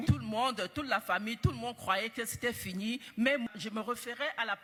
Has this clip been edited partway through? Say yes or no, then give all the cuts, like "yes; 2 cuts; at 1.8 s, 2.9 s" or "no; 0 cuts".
no; 0 cuts